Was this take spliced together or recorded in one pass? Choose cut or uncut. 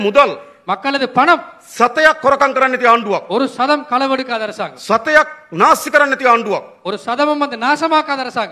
uncut